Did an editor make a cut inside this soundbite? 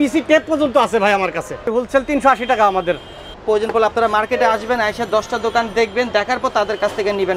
yes; 2 cuts; at 1.7 s, 3.4 s

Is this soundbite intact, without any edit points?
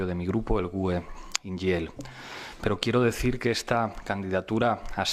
no; 1 cut; at 4.1 s

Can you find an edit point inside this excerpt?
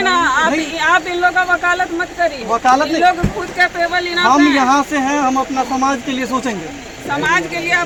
no; 0 cuts

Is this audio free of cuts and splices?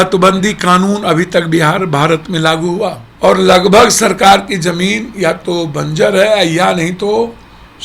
no; 1 cut; at 3.0 s

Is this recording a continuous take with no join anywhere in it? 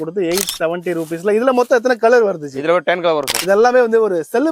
no; 1 cut; at 3.4 s

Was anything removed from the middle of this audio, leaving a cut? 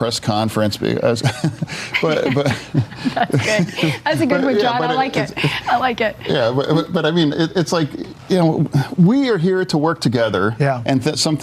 no; 0 cuts

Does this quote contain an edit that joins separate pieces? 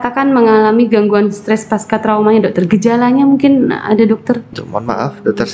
yes; 1 cut; at 4.5 s

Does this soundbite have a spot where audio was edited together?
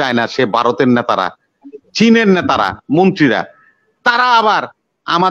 no; 0 cuts

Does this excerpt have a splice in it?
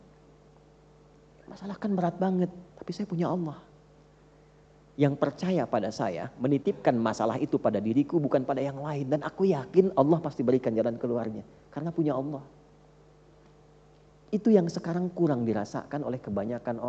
no; 0 cuts

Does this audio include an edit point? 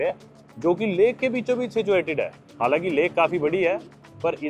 no; 0 cuts

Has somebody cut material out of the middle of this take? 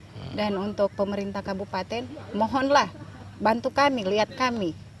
no; 0 cuts

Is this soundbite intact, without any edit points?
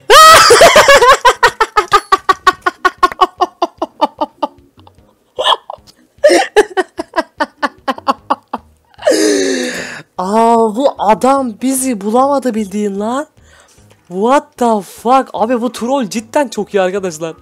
yes; 0 cuts

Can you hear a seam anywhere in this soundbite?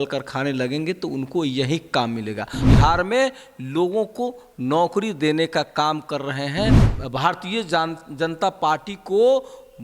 yes; 2 cuts; at 2.6 s, 6.9 s

